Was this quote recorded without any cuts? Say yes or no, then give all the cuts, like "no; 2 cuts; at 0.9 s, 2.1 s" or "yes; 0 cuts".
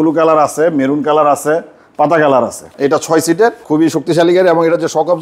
no; 2 cuts; at 2.7 s, 3.6 s